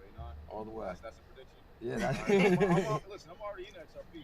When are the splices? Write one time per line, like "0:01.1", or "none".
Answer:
0:02.6

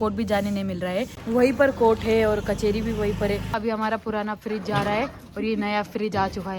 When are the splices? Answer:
0:01.2
0:03.5

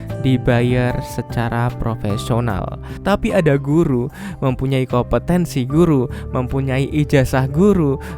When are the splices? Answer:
0:02.8

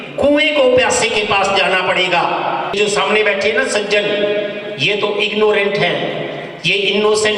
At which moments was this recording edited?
0:02.7

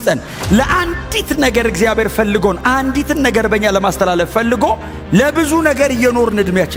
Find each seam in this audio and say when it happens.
none

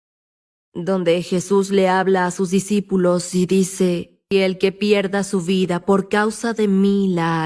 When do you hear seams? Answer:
0:04.2

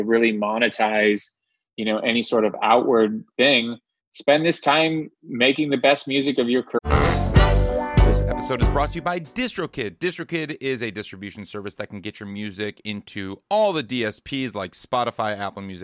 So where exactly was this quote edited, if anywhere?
0:06.8

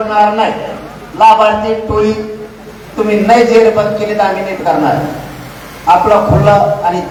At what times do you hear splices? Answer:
none

